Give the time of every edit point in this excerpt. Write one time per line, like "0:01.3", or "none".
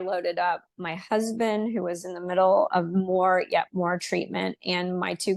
none